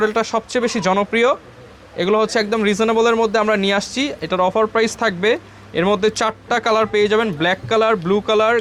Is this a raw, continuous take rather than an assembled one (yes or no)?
yes